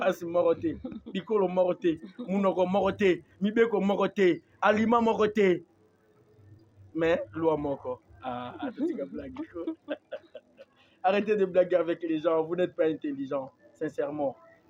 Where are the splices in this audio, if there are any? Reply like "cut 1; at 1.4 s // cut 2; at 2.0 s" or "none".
none